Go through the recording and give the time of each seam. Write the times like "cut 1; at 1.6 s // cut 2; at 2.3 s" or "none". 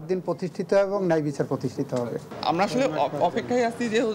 cut 1; at 2.3 s